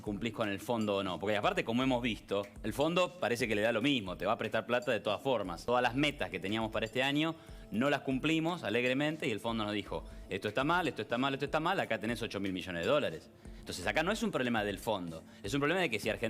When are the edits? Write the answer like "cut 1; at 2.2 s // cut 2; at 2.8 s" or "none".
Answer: cut 1; at 5.6 s